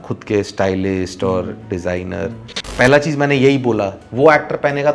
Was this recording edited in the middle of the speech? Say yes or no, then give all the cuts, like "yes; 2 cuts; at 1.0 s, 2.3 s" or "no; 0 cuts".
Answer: yes; 2 cuts; at 2.7 s, 4.0 s